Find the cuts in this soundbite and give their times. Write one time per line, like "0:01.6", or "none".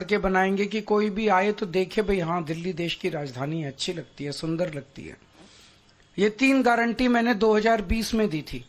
none